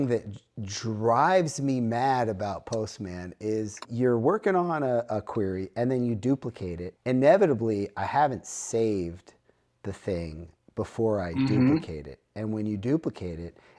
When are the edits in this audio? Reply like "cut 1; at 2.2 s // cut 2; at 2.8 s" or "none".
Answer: cut 1; at 3.9 s // cut 2; at 6.8 s